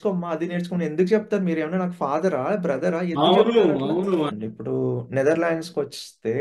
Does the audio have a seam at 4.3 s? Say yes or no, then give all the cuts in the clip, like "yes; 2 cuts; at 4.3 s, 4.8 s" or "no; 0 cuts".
yes; 1 cut; at 4.3 s